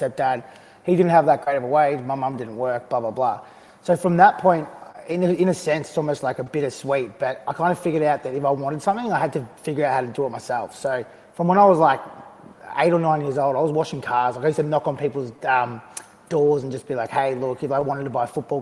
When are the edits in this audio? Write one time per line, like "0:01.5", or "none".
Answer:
none